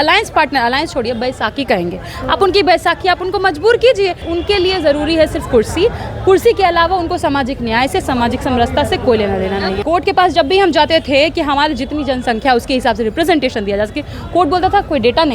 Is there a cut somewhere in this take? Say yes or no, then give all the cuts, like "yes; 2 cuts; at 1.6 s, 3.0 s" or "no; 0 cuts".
yes; 2 cuts; at 4.2 s, 9.8 s